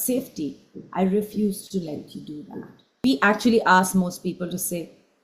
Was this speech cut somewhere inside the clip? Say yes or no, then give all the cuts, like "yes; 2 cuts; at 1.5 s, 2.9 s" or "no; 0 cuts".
yes; 1 cut; at 3.0 s